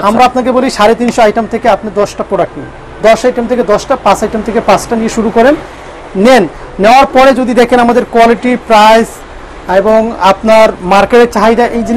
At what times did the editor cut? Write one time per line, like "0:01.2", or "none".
none